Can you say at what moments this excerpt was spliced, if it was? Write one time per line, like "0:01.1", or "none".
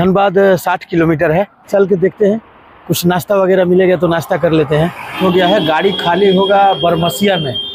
0:01.6
0:05.2